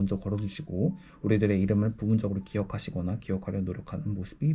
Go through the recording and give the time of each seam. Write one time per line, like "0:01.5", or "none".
none